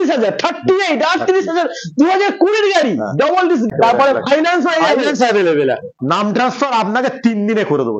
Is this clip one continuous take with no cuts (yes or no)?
no